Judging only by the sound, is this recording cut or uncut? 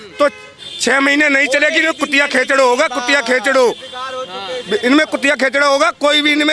uncut